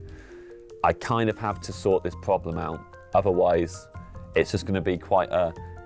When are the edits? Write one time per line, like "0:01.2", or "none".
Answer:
none